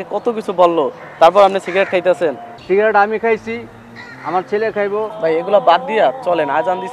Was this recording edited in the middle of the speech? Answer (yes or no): yes